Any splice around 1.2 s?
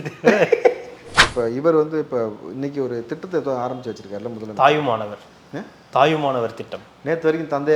yes; 1 cut; at 1.2 s

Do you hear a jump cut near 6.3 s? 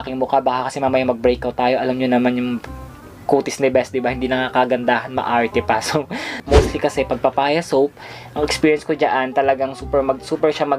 yes; 1 cut; at 6.3 s

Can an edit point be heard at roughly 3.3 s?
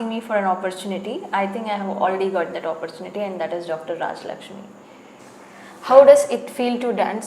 no; 1 cut; at 5.2 s

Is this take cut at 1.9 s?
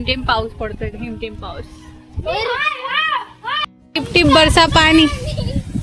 no; 1 cut; at 3.8 s

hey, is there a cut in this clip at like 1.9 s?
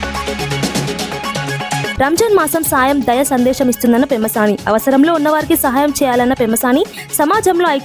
yes; 1 cut; at 1.9 s

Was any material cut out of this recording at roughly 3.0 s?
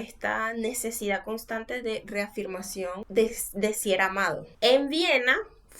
yes; 2 cuts; at 3.0 s, 4.5 s

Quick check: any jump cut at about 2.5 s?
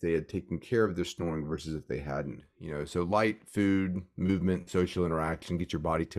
yes; 1 cut; at 2.5 s

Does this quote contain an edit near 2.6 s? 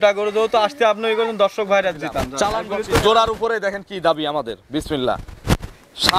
yes; 1 cut; at 2.6 s

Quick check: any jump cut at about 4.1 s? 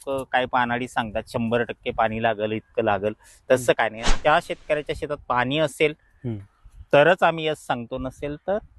yes; 1 cut; at 4.1 s

